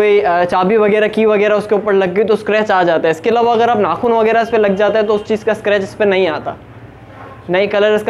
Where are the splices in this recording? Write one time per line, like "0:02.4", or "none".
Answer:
none